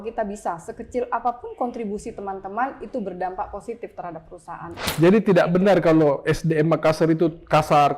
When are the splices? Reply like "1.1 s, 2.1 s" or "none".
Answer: 4.8 s